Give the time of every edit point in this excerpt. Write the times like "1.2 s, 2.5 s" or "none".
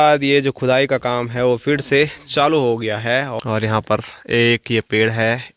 3.3 s